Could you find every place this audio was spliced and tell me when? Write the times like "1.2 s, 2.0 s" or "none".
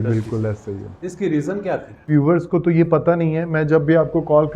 2.1 s